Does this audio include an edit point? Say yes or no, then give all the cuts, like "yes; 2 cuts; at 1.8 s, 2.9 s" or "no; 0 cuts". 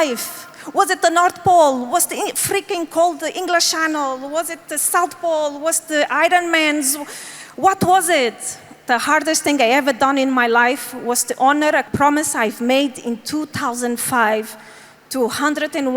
no; 0 cuts